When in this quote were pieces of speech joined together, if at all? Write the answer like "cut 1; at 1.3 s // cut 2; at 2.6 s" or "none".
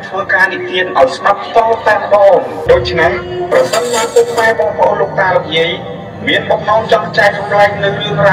cut 1; at 2.6 s